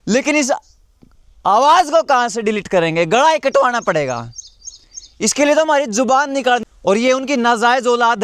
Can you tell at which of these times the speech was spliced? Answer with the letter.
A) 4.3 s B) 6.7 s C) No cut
B